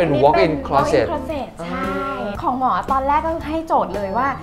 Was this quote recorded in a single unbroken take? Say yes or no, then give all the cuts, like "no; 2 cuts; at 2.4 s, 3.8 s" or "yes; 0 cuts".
yes; 0 cuts